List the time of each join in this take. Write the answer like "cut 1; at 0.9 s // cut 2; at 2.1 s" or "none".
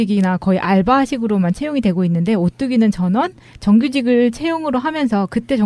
cut 1; at 2.1 s